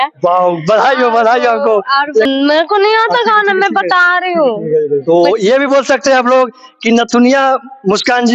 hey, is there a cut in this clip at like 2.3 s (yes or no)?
yes